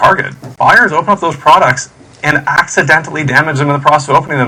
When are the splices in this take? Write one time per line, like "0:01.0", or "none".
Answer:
none